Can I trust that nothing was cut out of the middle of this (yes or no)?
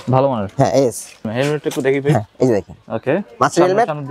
no